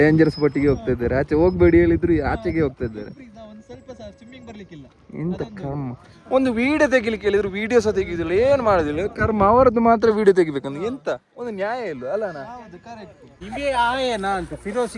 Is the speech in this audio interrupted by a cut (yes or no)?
yes